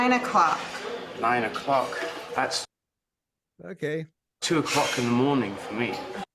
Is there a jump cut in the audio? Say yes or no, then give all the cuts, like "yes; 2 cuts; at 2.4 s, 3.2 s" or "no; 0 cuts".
no; 0 cuts